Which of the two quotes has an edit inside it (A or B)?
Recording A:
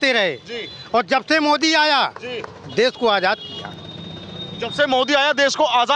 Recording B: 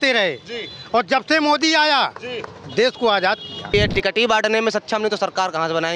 B